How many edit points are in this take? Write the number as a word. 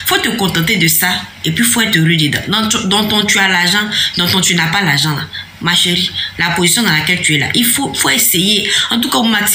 two